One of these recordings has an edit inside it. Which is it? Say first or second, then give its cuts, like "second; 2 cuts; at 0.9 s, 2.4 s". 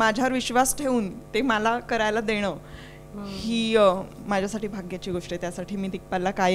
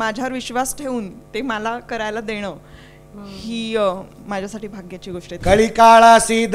second; 1 cut; at 5.3 s